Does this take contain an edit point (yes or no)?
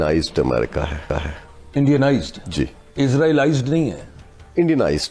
no